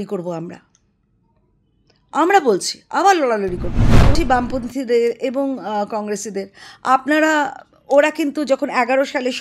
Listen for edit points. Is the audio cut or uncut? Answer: cut